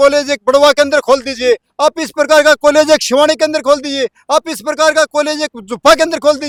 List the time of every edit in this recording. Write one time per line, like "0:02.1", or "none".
none